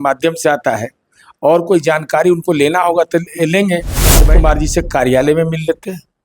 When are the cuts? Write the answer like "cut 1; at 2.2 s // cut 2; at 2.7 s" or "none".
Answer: cut 1; at 4.1 s